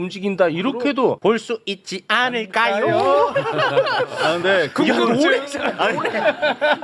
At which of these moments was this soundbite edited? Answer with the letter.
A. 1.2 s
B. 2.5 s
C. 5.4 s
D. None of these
A